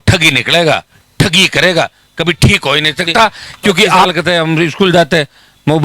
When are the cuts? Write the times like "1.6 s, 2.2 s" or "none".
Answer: 4.0 s

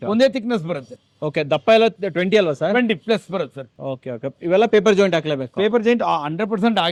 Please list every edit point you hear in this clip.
none

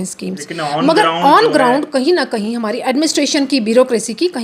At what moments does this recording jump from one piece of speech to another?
none

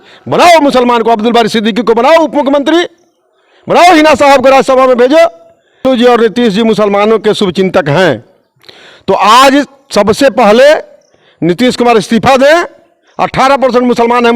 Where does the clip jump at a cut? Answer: 5.9 s

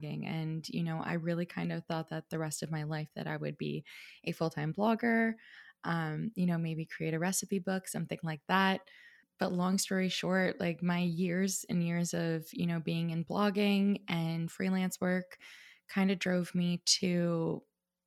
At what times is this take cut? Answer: 9.2 s

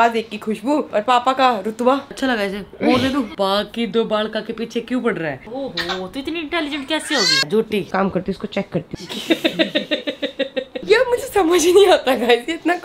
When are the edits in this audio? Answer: 2.2 s, 3.3 s, 5.5 s, 7.8 s, 8.9 s, 10.7 s

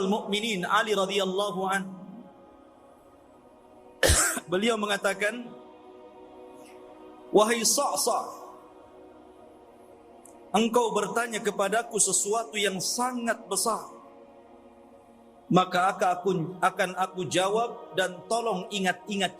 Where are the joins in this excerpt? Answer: 2.6 s, 4.0 s, 5.9 s, 7.3 s, 8.6 s, 10.5 s

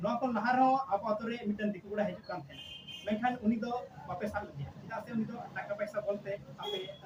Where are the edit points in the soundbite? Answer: none

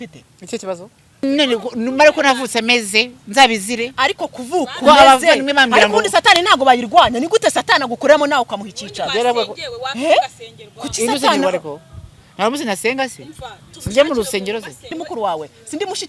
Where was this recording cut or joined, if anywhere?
1.2 s, 14.9 s

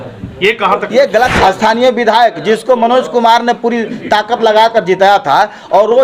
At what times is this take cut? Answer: 1.3 s

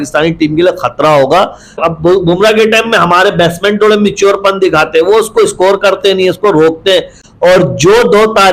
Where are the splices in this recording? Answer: 1.8 s, 7.2 s

